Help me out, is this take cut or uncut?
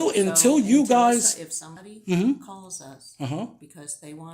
uncut